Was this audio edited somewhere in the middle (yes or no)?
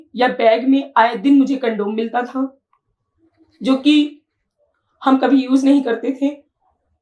no